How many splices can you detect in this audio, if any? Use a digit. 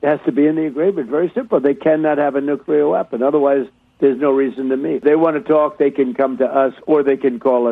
1